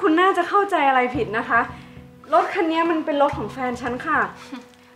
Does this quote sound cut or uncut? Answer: uncut